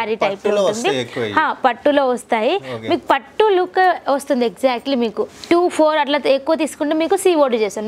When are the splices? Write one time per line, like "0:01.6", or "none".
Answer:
0:05.2